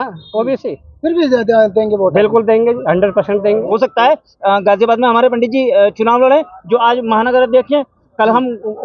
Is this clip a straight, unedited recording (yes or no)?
no